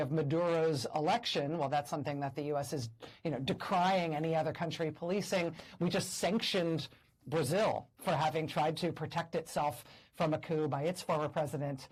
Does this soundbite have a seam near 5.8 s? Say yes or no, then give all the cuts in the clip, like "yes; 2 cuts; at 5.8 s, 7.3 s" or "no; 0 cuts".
no; 0 cuts